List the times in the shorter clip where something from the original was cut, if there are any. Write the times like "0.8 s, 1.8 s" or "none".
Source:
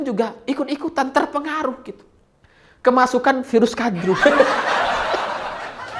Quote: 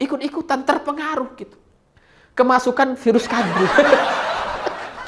4.0 s

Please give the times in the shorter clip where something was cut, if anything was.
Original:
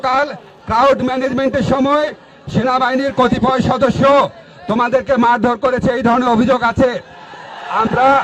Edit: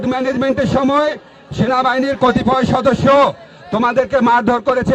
none

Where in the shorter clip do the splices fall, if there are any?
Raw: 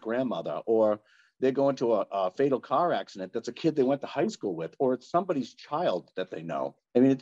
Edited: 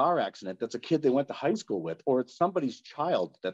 none

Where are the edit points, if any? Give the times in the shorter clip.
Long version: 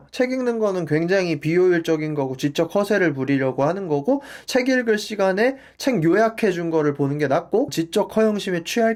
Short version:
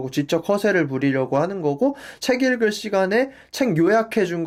none

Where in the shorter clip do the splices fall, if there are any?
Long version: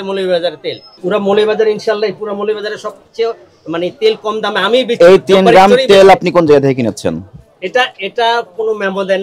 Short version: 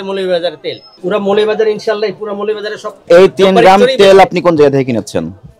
3.0 s

